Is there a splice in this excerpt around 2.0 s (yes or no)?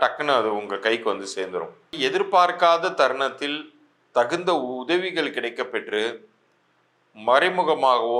yes